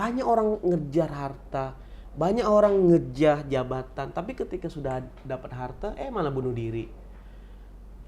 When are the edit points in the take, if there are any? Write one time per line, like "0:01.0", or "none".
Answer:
none